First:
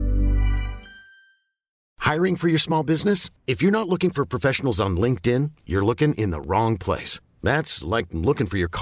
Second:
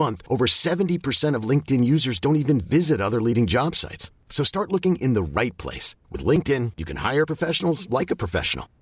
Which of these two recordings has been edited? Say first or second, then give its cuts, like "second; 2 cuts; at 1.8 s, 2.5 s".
first; 1 cut; at 1.8 s